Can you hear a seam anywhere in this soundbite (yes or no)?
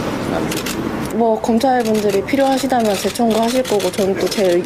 no